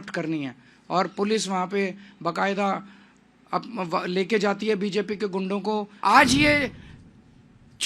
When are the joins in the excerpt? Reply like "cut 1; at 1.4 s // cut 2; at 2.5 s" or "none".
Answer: cut 1; at 5.9 s